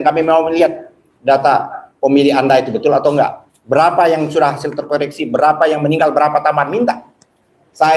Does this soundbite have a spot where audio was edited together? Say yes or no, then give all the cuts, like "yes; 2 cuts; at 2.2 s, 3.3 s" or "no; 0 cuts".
no; 0 cuts